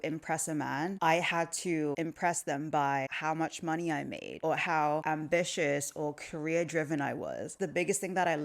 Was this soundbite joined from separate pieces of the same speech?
yes; 6 cuts; at 1.0 s, 1.9 s, 3.1 s, 4.3 s, 5.0 s, 7.6 s

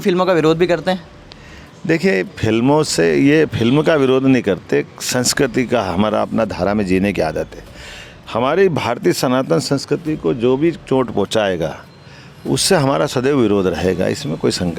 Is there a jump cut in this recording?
no; 0 cuts

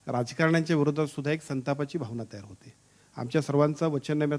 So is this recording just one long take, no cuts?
yes; 0 cuts

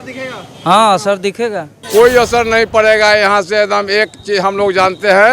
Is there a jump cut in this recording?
yes; 1 cut; at 1.7 s

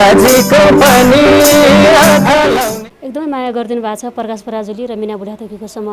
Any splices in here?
yes; 1 cut; at 2.7 s

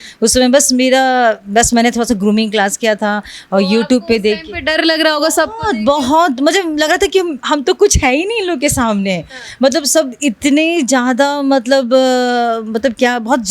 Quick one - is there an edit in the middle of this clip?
no; 0 cuts

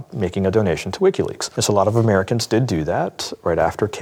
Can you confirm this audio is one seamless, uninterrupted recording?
no; 1 cut; at 1.5 s

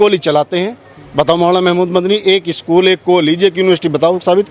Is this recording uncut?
yes; 0 cuts

